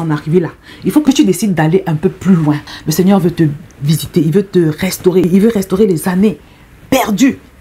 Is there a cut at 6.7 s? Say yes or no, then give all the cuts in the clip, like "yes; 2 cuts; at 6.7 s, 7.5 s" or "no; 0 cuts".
no; 2 cuts; at 1.0 s, 2.8 s